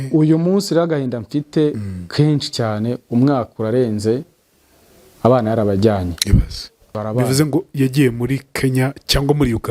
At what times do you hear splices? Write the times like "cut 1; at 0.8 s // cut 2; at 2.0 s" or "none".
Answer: cut 1; at 6.9 s